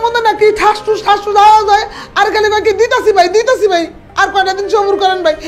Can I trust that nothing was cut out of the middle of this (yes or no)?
yes